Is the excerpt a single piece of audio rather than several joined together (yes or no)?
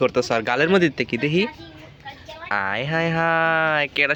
yes